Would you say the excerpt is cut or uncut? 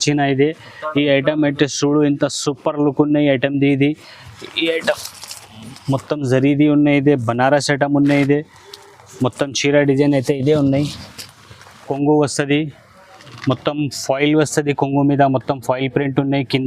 cut